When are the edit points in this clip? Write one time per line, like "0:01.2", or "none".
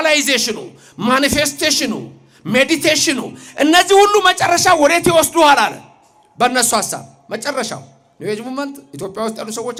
none